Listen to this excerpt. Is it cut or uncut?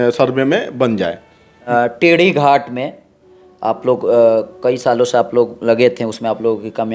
cut